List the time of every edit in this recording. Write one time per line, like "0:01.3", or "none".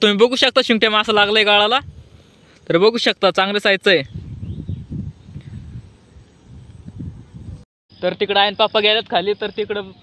none